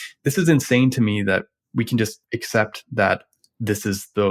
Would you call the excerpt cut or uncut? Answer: uncut